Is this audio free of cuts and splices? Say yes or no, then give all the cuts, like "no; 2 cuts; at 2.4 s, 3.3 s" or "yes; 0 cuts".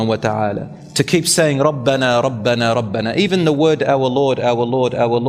yes; 0 cuts